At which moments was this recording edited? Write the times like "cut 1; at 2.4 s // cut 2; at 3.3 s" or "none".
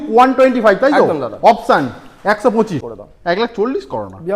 cut 1; at 2.9 s